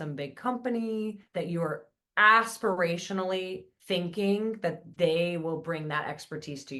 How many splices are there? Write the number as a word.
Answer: two